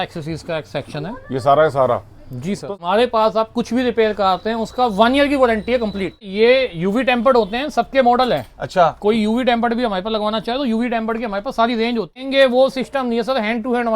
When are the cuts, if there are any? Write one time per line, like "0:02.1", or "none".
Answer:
0:02.7
0:06.3
0:12.2